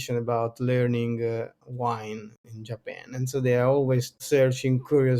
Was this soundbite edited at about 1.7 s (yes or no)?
no